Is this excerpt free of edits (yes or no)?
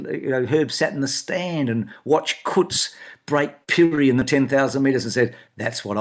yes